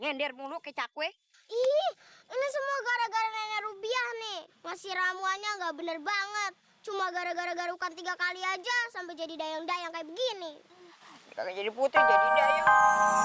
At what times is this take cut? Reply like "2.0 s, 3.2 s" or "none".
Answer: 11.9 s